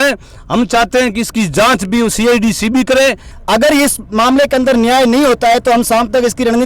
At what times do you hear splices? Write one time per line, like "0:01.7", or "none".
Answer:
0:03.3